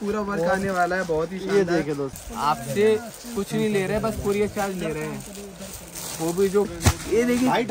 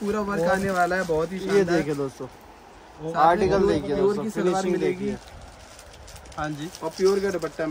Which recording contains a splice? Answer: first; 2 cuts; at 2.2 s, 6.7 s

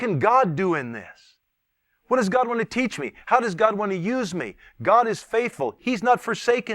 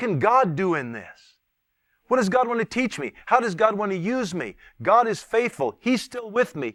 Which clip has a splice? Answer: first; 1 cut; at 5.8 s

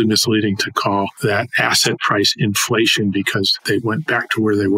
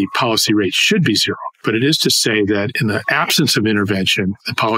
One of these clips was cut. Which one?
first; 1 cut; at 3.6 s

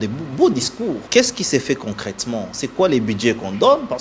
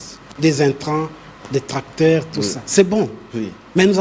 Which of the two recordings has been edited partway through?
first; 1 cut; at 1.0 s

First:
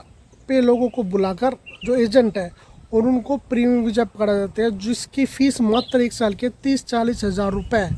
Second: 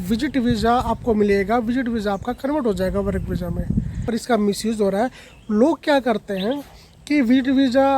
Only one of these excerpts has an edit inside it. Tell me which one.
second; 1 cut; at 4.0 s

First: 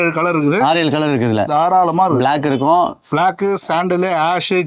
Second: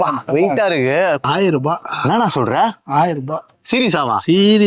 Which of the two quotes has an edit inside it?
second; 1 cut; at 1.2 s

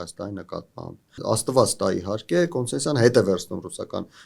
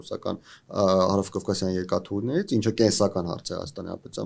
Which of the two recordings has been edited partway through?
first; 1 cut; at 1.2 s

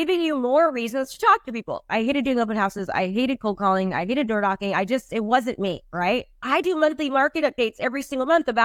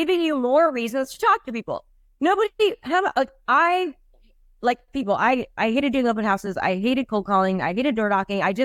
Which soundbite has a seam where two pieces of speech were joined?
first; 2 cuts; at 1.8 s, 6.4 s

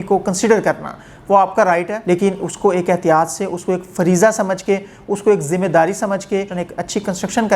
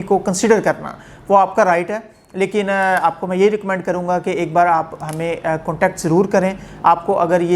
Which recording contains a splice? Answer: first; 2 cuts; at 1.9 s, 6.5 s

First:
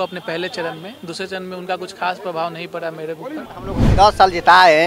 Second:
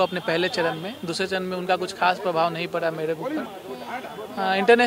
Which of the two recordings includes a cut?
first; 1 cut; at 3.8 s

